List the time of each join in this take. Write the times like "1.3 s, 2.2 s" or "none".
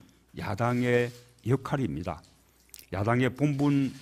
1.8 s